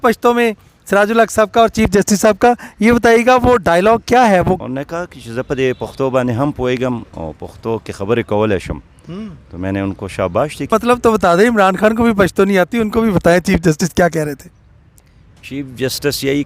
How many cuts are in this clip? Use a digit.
2